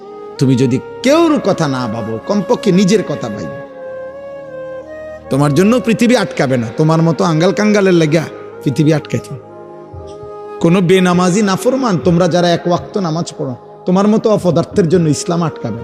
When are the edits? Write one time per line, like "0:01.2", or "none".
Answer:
0:03.4
0:04.9